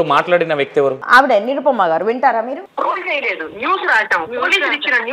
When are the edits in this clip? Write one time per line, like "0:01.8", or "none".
0:01.0
0:02.7